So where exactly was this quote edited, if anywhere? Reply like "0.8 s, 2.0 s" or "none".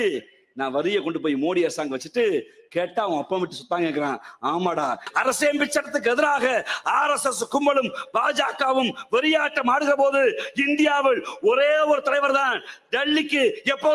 5.1 s